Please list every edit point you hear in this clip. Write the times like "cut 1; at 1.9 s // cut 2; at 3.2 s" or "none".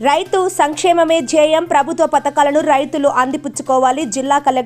none